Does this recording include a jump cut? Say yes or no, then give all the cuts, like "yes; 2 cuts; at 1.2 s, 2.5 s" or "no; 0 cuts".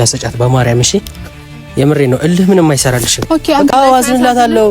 yes; 1 cut; at 3.7 s